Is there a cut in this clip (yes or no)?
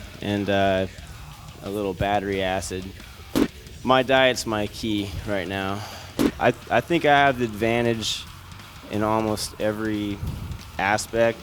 yes